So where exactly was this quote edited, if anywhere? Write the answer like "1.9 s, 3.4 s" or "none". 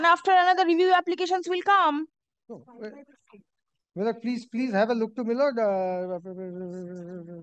none